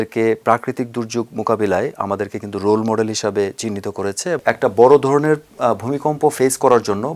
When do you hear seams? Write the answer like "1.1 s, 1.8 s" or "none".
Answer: 4.4 s